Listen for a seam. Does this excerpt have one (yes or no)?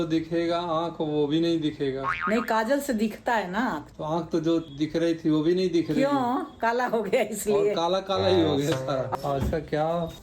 yes